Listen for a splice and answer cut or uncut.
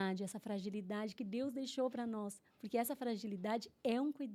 uncut